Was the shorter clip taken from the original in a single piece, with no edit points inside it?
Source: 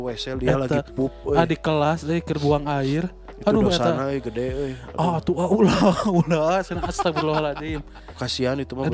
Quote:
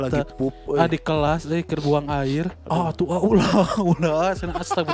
no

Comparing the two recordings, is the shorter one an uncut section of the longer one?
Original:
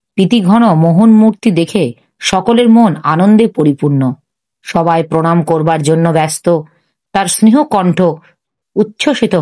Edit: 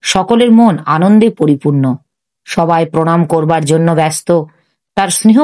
yes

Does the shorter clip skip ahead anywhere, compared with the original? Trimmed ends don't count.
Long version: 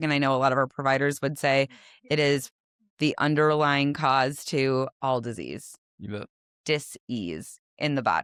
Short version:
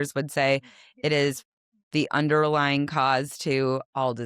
no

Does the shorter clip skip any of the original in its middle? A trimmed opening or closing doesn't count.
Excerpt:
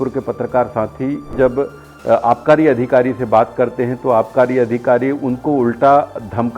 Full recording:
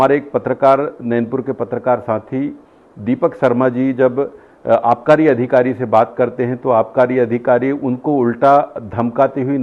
yes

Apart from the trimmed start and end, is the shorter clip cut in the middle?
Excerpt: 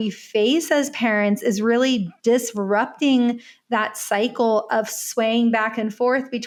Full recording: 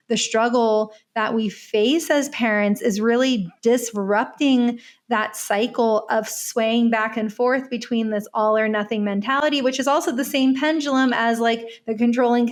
no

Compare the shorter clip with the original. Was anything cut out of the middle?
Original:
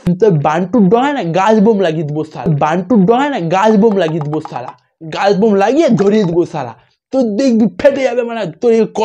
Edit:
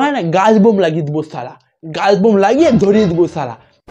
yes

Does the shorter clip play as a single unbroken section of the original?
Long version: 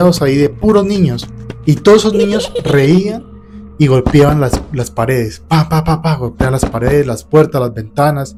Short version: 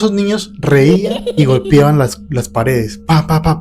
no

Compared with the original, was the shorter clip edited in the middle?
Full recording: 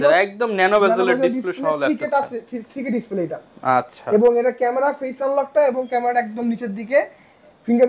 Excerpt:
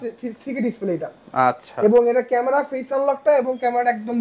no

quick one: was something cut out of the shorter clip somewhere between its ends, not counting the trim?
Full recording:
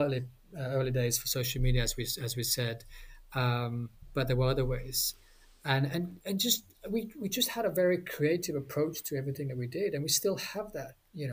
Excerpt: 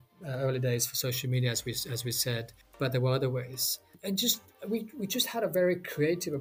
yes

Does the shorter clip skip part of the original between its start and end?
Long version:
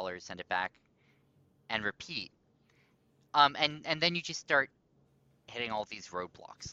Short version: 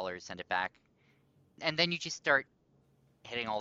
yes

